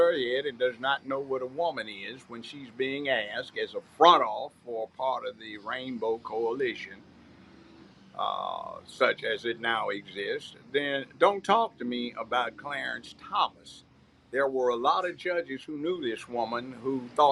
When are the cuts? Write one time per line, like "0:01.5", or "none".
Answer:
none